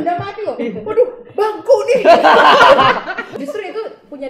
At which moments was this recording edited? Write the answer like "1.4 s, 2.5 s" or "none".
3.3 s

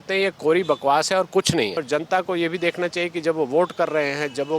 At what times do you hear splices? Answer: 1.8 s

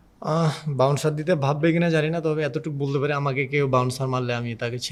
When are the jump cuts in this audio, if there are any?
none

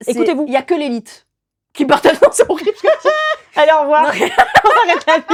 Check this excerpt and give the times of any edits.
none

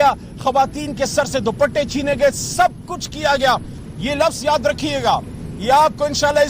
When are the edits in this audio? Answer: 3.8 s

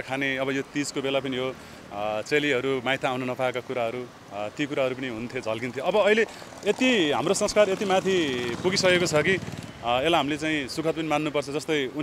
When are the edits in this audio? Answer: none

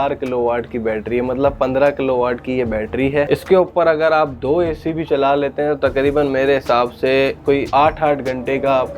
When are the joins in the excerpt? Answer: 3.3 s, 7.7 s

